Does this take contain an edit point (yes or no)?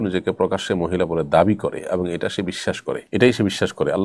yes